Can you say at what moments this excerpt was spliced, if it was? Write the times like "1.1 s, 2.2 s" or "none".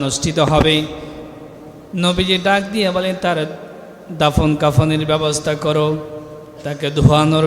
none